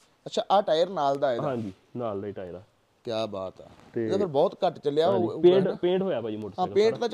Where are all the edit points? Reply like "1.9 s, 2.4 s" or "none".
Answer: none